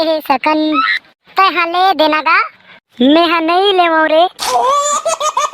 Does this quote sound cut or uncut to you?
cut